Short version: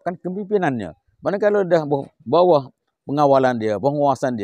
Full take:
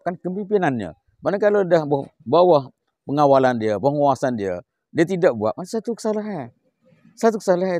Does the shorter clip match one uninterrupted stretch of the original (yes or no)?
yes